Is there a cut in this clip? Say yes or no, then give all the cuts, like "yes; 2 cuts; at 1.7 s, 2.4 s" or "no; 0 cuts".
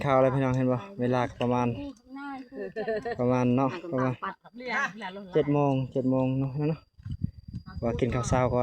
no; 0 cuts